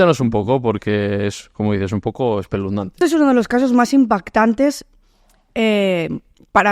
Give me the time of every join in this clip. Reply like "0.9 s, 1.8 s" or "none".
3.0 s